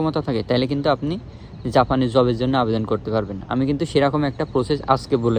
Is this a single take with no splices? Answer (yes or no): yes